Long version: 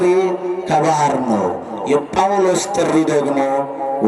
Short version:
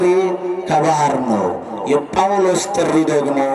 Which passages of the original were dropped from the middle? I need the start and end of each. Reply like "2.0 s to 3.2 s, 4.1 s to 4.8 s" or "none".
none